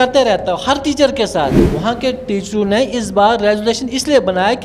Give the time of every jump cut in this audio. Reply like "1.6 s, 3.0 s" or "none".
1.7 s

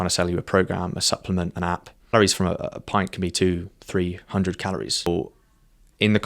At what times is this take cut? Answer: 2.1 s, 5.1 s

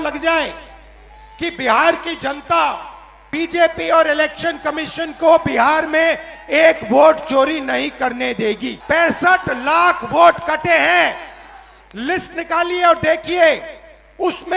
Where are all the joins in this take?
3.3 s, 8.7 s

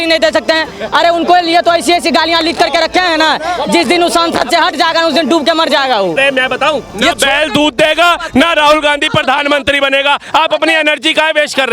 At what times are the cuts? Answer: 6.2 s

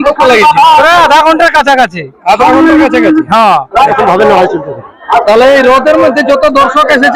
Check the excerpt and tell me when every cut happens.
3.9 s

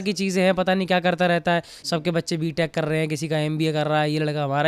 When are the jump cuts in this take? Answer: 1.7 s

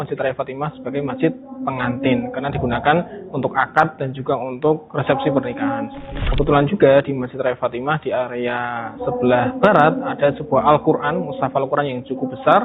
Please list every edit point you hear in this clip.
6.2 s

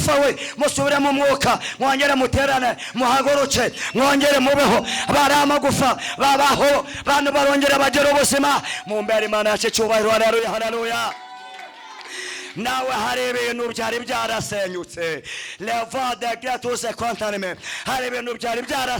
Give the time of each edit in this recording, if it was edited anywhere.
none

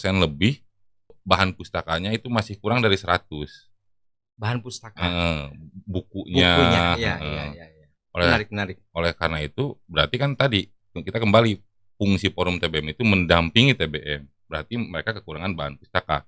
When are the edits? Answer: 1.1 s

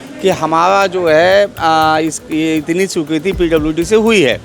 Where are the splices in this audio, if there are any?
none

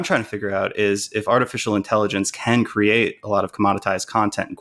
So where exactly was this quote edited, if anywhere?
none

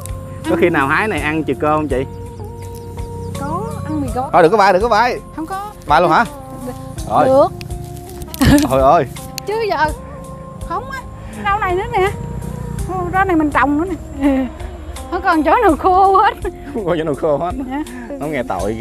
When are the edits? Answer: 4.2 s, 11.4 s, 14.2 s

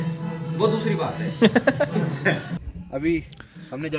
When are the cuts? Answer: 2.6 s

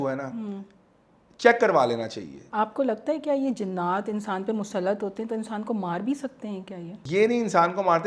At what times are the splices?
2.4 s, 7.0 s

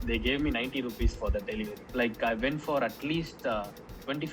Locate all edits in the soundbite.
1.8 s

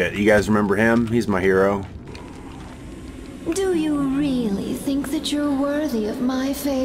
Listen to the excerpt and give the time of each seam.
2.1 s

